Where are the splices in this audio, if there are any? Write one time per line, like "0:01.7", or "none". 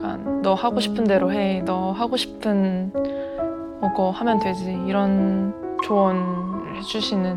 none